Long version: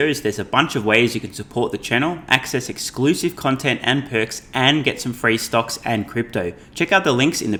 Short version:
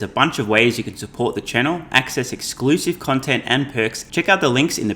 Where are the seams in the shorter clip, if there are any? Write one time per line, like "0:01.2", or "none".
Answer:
0:04.0

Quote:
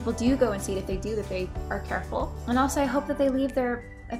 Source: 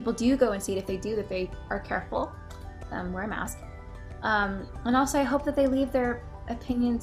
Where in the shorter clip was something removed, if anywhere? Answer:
0:02.4

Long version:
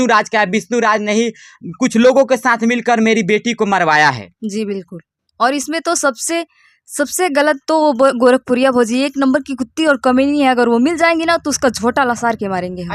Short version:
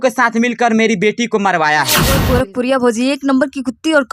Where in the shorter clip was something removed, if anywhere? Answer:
0:02.2

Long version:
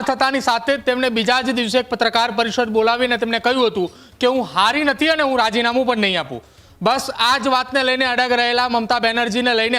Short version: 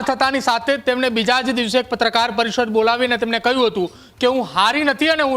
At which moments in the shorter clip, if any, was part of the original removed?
none

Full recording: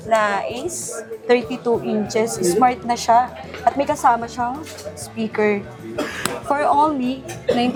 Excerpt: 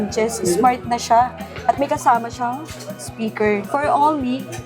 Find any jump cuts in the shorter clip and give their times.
0:03.7

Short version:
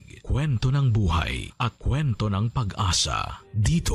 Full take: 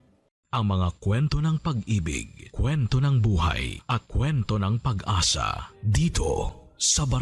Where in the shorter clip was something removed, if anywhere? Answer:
none

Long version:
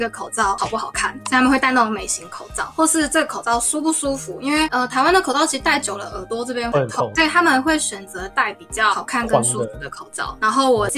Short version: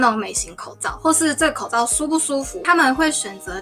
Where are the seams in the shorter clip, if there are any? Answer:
0:02.6

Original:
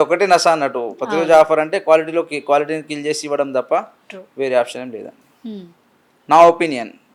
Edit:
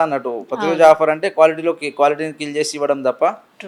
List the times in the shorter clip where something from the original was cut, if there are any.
none

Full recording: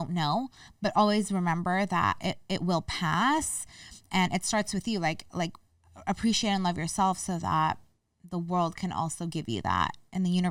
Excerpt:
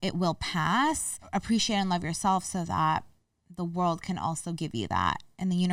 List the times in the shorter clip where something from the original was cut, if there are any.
0:01.1

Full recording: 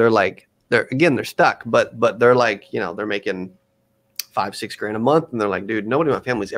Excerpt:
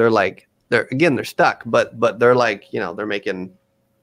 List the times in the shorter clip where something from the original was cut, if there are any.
none

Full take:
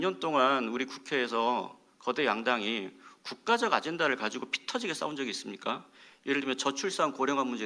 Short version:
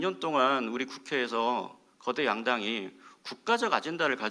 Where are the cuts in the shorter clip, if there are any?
none

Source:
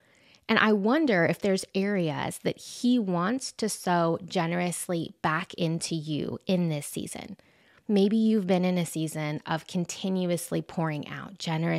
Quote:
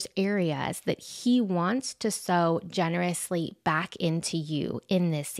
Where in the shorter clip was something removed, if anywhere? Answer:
none

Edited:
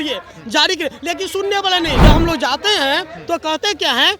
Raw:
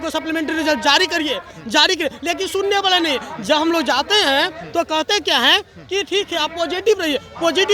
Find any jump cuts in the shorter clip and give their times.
0:02.0

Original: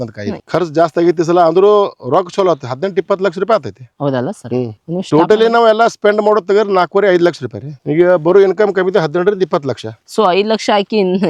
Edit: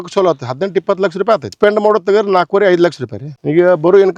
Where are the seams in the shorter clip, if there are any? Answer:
0:01.5

